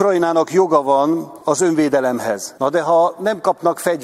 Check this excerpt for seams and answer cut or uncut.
cut